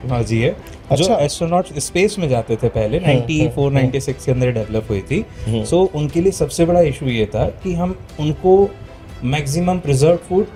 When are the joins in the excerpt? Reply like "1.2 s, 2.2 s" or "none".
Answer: none

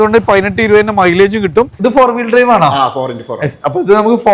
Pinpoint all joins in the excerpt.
1.7 s

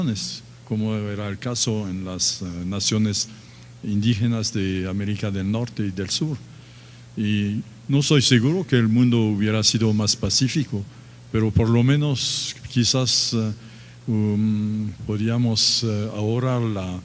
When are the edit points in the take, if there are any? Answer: 1.8 s

